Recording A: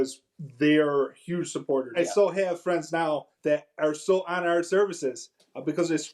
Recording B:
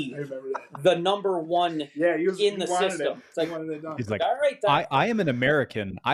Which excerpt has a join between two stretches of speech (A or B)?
A